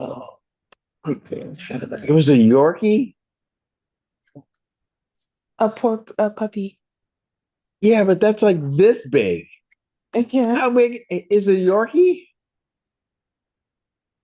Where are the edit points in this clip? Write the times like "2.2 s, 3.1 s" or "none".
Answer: none